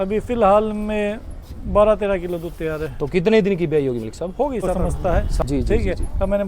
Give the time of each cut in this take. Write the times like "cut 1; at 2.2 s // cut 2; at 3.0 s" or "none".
cut 1; at 4.8 s